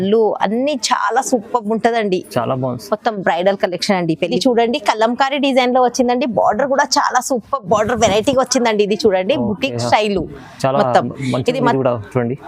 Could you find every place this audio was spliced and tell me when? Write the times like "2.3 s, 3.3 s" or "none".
4.4 s